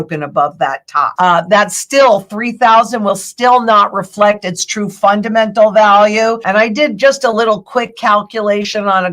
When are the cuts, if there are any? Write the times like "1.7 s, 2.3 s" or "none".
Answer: 1.1 s, 6.4 s